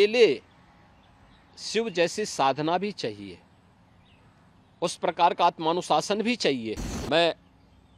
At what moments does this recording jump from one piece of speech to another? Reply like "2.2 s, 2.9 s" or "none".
6.9 s